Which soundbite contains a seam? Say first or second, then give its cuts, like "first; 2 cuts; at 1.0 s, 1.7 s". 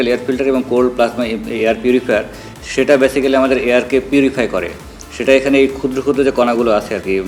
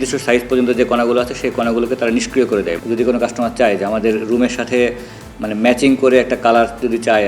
second; 1 cut; at 2.8 s